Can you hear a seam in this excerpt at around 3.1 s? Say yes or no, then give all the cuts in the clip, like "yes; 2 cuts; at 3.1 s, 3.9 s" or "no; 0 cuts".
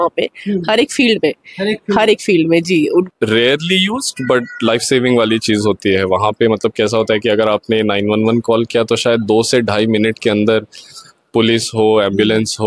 yes; 1 cut; at 3.1 s